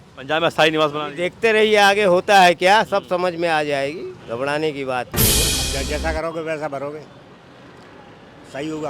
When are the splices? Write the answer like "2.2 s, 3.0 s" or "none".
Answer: 5.5 s